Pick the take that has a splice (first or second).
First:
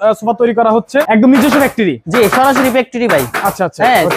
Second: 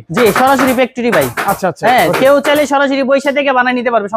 first